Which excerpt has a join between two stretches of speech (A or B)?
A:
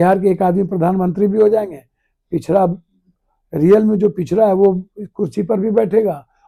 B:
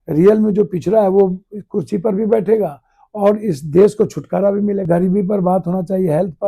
B